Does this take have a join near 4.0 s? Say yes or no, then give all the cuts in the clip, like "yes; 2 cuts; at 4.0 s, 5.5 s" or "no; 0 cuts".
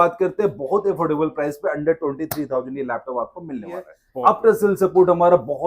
yes; 1 cut; at 4.0 s